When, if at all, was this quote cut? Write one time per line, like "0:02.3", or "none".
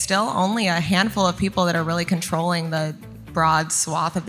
none